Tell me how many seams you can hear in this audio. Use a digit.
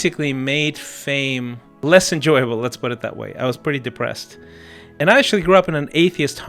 2